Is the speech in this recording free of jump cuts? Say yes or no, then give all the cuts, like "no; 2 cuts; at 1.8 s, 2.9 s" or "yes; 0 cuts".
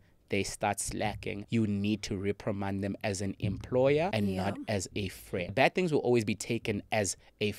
no; 3 cuts; at 1.3 s, 4.1 s, 5.5 s